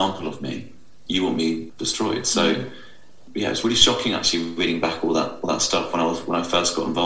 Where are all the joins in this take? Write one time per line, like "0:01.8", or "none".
0:00.9
0:01.7
0:03.2